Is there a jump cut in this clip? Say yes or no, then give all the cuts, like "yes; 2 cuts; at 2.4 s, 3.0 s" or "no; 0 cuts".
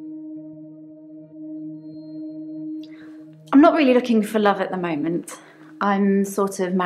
yes; 1 cut; at 3.5 s